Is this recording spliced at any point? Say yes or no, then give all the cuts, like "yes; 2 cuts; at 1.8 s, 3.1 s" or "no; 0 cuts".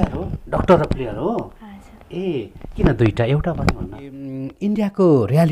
yes; 1 cut; at 4.5 s